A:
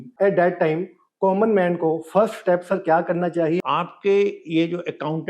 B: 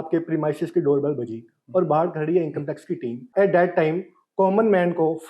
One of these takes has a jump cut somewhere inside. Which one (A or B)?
A